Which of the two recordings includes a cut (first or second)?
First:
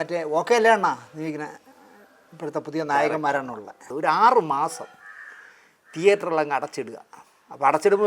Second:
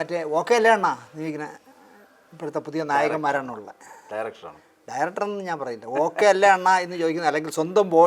first